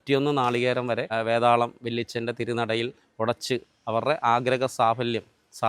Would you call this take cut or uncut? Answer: cut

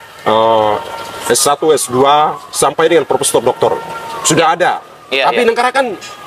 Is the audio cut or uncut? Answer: uncut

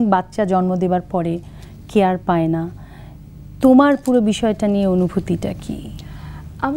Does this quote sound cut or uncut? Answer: uncut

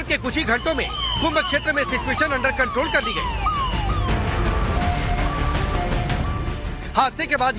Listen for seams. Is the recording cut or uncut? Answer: cut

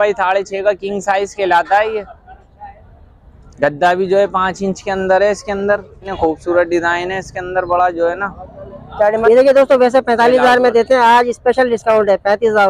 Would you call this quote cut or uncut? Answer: cut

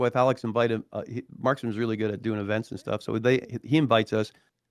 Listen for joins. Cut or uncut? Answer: uncut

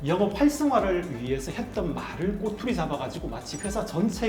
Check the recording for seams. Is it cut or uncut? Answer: uncut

